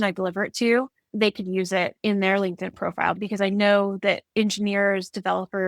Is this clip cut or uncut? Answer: cut